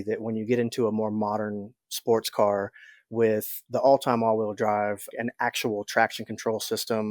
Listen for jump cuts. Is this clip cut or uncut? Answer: cut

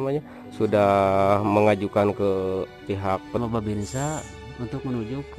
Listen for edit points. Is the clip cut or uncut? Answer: cut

